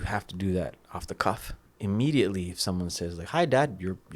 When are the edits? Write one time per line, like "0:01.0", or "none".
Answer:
0:01.7